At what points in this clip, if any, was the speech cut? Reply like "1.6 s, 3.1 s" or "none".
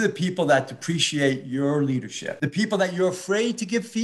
2.2 s